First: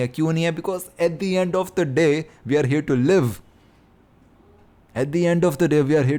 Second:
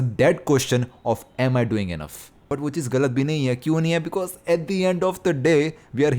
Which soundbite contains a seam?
second; 1 cut; at 2.5 s

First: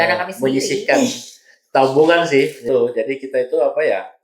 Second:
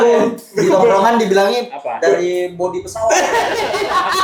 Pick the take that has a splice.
first; 1 cut; at 2.6 s

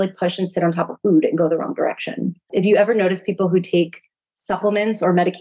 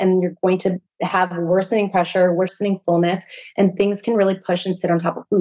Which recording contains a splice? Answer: first; 1 cut; at 2.4 s

